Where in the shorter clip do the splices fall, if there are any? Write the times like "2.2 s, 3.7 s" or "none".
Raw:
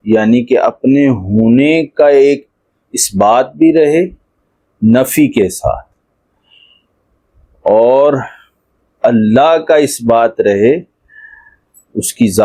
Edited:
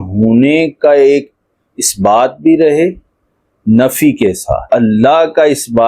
4.6 s